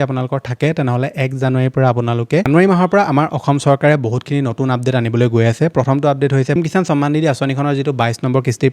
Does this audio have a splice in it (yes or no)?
yes